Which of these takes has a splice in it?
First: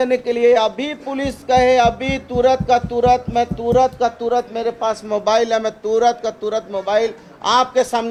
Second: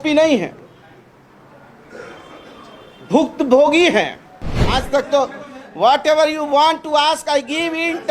second; 1 cut; at 4.6 s

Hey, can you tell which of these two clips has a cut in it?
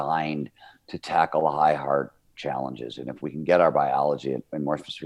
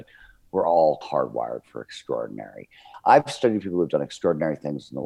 second; 2 cuts; at 1.0 s, 2.8 s

